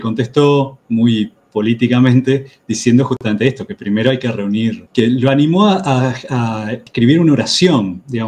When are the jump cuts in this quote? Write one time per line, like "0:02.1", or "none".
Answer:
0:06.8